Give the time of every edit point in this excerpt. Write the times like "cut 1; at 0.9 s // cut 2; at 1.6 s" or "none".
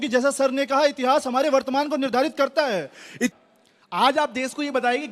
cut 1; at 3.3 s